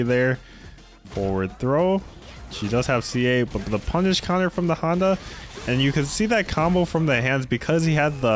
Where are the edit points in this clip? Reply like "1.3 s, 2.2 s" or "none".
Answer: none